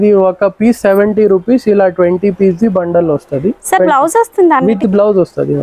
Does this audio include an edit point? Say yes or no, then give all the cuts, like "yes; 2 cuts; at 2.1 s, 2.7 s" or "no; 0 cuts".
no; 0 cuts